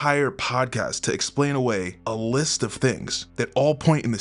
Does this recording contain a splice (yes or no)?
yes